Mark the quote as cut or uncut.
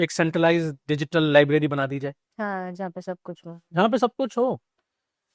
uncut